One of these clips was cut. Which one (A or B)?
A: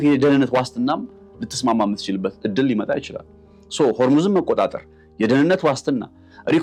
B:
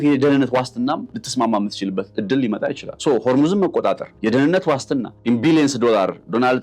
B